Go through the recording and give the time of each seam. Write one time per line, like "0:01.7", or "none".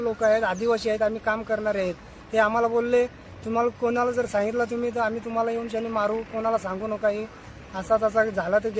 none